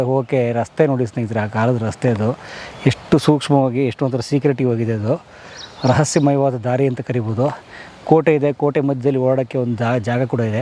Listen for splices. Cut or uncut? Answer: uncut